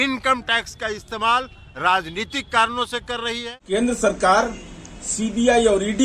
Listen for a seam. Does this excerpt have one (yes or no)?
yes